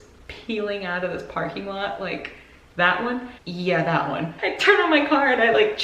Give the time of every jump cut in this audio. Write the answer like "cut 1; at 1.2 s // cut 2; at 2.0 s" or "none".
cut 1; at 3.3 s // cut 2; at 4.3 s